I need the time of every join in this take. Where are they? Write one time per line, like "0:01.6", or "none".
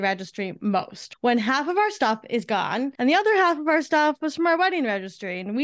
0:01.0
0:02.9